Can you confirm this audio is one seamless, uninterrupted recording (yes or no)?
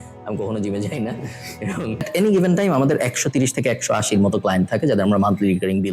no